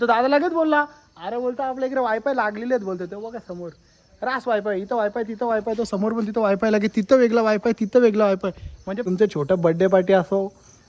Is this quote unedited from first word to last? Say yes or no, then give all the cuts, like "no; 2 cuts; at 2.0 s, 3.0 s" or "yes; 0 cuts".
no; 1 cut; at 9.0 s